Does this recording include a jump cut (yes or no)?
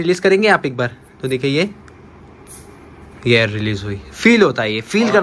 no